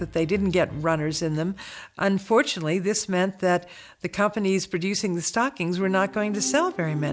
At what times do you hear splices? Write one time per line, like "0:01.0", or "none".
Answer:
none